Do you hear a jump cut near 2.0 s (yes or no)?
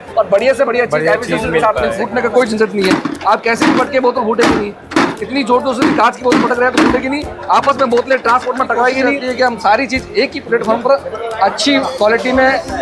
yes